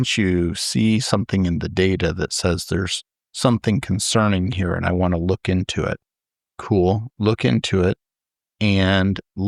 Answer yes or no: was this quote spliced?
no